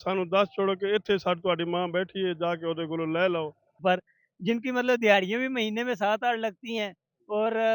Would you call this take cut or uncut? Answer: cut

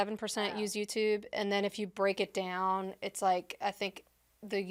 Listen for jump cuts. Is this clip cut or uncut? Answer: uncut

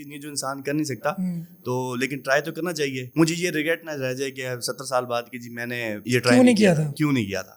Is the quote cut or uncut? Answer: uncut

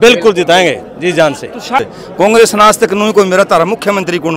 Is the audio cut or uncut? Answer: cut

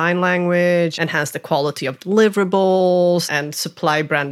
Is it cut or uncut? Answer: cut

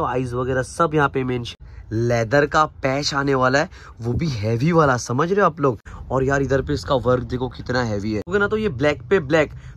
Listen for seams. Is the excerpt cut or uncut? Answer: cut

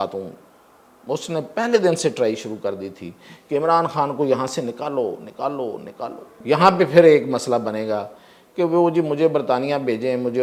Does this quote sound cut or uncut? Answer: cut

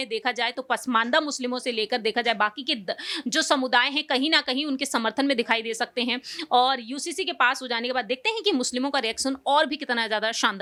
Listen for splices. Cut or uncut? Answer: uncut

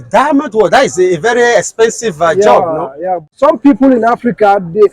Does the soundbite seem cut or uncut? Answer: cut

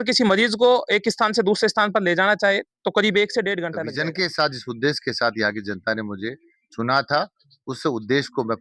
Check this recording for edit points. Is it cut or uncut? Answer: cut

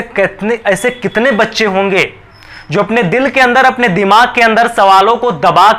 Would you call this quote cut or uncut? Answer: uncut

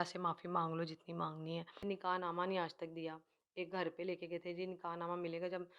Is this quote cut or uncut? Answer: cut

